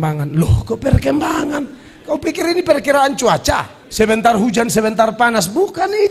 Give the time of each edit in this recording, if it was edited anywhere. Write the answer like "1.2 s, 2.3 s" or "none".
3.8 s